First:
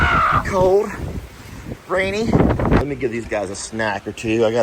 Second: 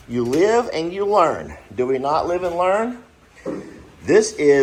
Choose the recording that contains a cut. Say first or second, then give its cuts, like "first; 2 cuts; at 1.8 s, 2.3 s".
first; 1 cut; at 2.8 s